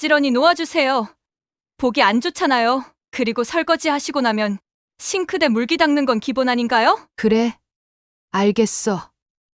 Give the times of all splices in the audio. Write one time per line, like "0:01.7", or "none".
0:07.1